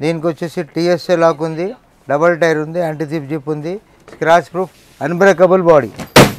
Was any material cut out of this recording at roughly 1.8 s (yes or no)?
no